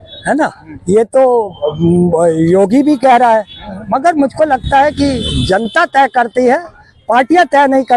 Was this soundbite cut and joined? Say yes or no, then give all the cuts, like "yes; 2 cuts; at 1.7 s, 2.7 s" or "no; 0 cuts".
no; 0 cuts